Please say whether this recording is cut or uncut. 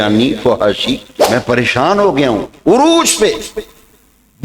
cut